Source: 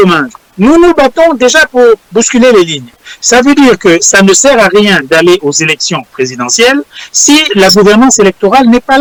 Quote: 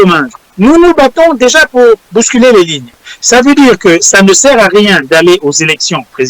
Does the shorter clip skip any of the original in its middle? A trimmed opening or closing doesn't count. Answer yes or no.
no